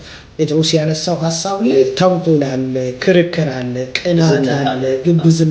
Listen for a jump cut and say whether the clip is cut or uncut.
cut